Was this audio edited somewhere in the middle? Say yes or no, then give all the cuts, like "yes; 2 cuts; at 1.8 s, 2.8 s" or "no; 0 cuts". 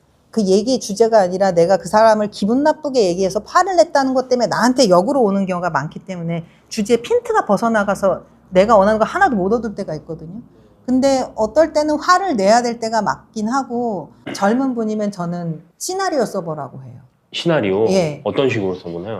yes; 1 cut; at 14.1 s